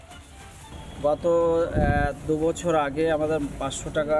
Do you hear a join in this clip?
yes; 1 cut; at 0.9 s

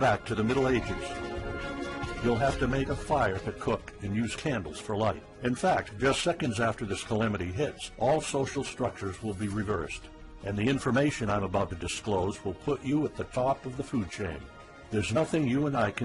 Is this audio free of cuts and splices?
no; 1 cut; at 4.6 s

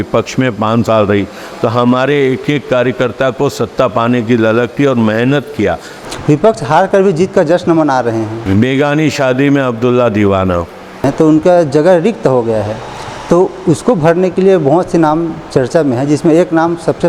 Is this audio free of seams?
no; 3 cuts; at 6.0 s, 8.4 s, 11.1 s

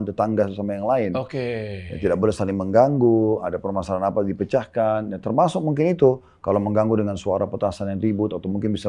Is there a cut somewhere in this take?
no; 0 cuts

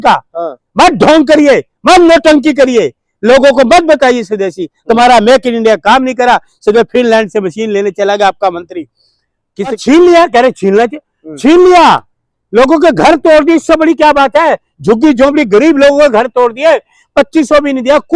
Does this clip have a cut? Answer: yes; 1 cut; at 9.8 s

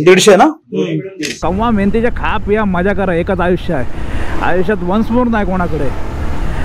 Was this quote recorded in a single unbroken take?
no; 1 cut; at 1.3 s

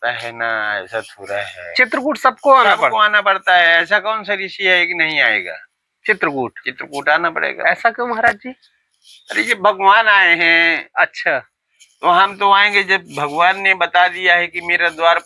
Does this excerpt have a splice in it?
no; 0 cuts

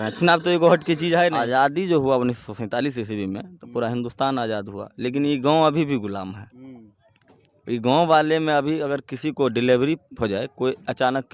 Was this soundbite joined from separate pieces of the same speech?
yes; 1 cut; at 1.4 s

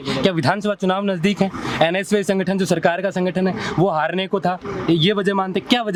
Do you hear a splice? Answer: no; 0 cuts

